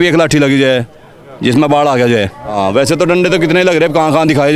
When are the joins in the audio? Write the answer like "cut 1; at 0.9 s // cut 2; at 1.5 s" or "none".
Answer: cut 1; at 2.4 s